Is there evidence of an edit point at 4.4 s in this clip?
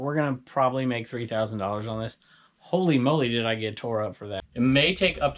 yes; 1 cut; at 4.4 s

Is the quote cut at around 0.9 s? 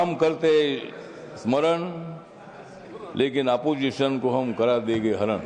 no; 0 cuts

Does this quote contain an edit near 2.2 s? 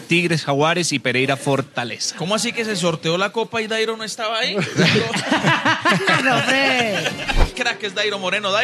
no; 1 cut; at 7.5 s

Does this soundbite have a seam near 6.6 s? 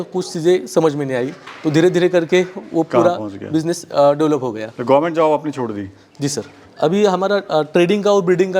yes; 1 cut; at 6.6 s

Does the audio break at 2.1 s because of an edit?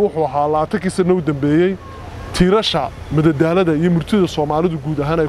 no; 0 cuts

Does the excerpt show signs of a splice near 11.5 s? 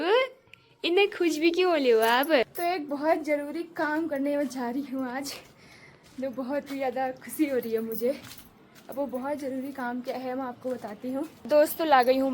yes; 2 cuts; at 2.5 s, 11.5 s

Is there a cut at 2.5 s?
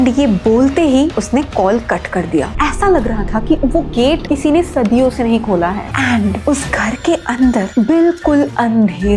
yes; 2 cuts; at 2.5 s, 5.8 s

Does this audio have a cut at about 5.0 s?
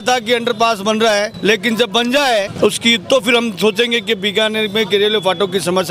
no; 2 cuts; at 1.3 s, 2.5 s

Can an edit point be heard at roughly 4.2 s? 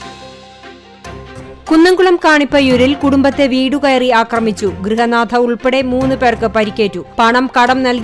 no; 1 cut; at 1.6 s

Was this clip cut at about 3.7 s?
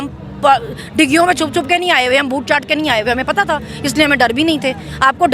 no; 0 cuts

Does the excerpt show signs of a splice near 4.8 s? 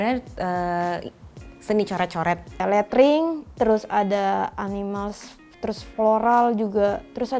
no; 1 cut; at 2.6 s

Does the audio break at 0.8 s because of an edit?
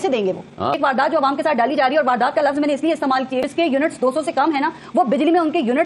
yes; 2 cuts; at 0.8 s, 3.5 s

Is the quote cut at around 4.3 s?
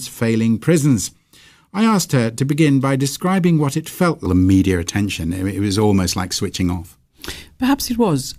no; 0 cuts

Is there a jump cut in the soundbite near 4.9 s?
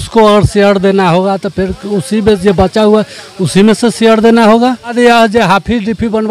yes; 1 cut; at 4.9 s

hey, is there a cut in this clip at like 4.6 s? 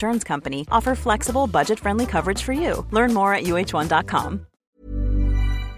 yes; 1 cut; at 4.6 s

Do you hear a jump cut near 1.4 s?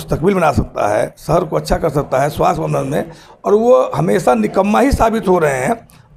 no; 0 cuts

